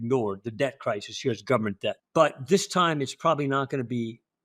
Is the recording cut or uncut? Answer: cut